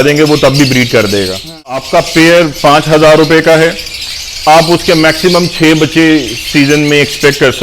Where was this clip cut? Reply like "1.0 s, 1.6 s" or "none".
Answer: 1.8 s